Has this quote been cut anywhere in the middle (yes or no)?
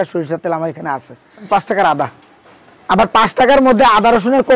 yes